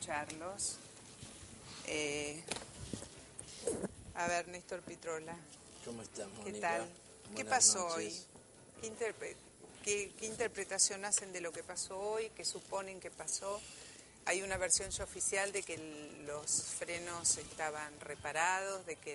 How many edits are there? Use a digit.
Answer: 0